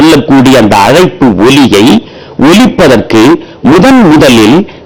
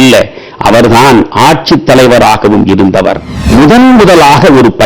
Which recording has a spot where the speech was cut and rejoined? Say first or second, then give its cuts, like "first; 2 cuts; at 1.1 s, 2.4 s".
second; 1 cut; at 3.3 s